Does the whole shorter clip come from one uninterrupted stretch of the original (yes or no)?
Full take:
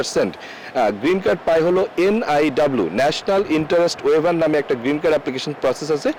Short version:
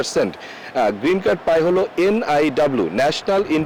yes